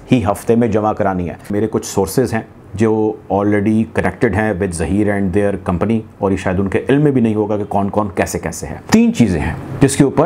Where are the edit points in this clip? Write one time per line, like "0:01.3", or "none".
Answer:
0:01.5
0:08.7